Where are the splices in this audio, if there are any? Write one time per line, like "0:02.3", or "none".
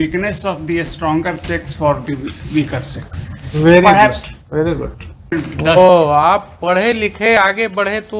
0:05.3